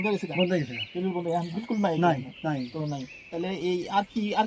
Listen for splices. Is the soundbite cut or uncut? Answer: uncut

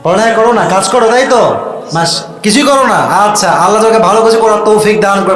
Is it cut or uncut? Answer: uncut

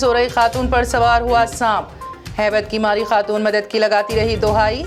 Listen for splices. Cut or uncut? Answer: uncut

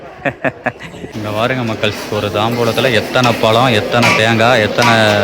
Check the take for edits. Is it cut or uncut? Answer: cut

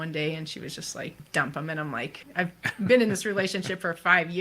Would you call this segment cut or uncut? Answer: cut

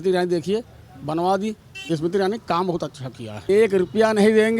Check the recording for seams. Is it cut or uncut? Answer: cut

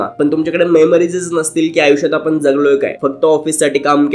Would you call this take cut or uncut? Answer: uncut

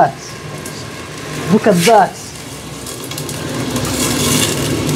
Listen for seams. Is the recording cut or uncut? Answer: uncut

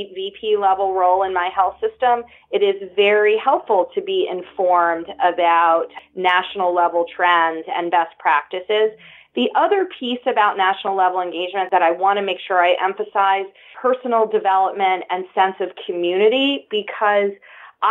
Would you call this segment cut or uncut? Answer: cut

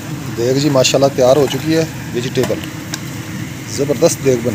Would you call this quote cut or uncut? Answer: uncut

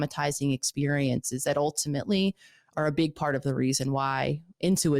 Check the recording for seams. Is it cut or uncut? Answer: uncut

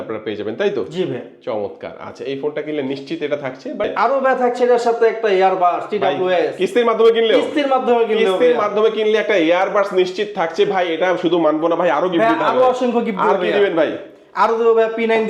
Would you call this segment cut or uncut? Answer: cut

